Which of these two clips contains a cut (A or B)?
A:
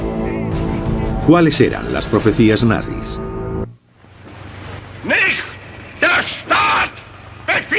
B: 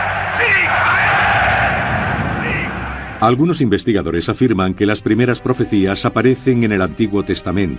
B